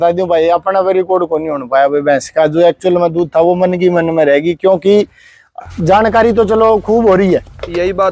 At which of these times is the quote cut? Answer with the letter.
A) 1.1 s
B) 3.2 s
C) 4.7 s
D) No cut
D